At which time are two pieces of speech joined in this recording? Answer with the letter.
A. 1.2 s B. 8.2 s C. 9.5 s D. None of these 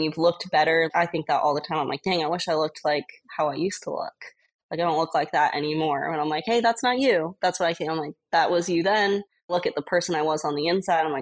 C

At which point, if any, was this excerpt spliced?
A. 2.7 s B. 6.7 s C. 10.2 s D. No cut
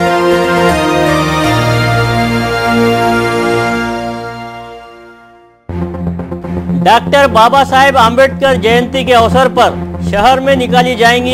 B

